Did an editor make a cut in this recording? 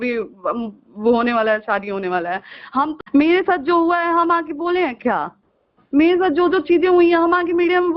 yes; 1 cut; at 3.0 s

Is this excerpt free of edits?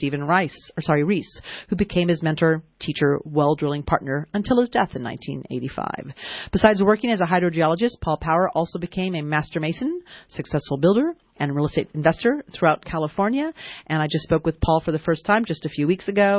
no; 1 cut; at 8.8 s

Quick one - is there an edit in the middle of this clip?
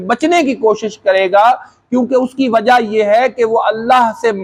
no; 0 cuts

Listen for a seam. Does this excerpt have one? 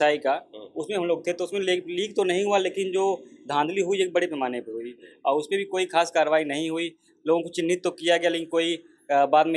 no; 0 cuts

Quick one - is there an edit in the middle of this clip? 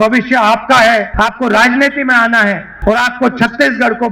yes; 2 cuts; at 1.1 s, 2.7 s

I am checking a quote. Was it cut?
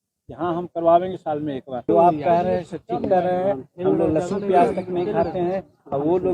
yes; 1 cut; at 1.8 s

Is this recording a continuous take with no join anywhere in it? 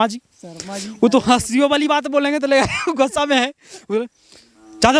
yes; 0 cuts

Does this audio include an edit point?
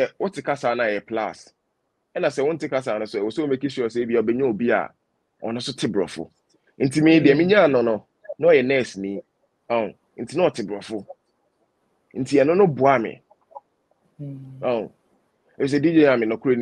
no; 0 cuts

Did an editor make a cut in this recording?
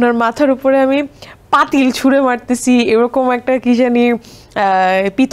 no; 0 cuts

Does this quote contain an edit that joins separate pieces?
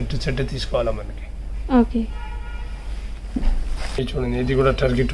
no; 0 cuts

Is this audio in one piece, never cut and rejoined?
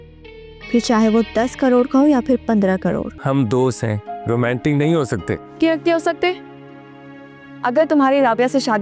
no; 1 cut; at 3.1 s

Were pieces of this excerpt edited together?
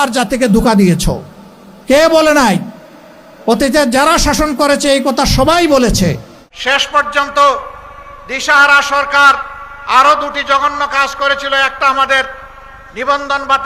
yes; 1 cut; at 6.7 s

